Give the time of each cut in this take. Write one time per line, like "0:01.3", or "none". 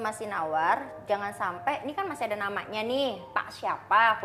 none